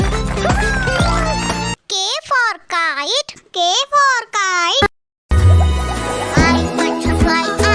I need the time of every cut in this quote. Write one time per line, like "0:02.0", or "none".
0:01.8